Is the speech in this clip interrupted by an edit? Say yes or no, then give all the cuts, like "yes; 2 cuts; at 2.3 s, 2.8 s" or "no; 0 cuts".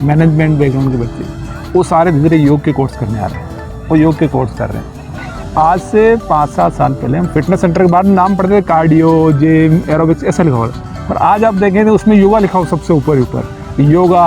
yes; 1 cut; at 5.4 s